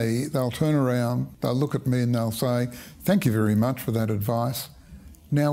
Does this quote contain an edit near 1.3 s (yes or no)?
yes